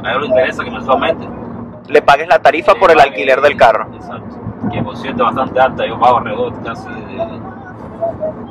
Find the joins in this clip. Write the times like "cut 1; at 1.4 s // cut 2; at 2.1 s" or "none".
none